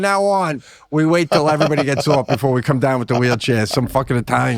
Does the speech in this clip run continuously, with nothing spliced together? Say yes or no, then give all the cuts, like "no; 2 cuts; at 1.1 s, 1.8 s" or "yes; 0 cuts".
yes; 0 cuts